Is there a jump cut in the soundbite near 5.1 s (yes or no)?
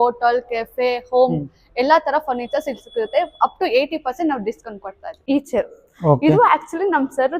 yes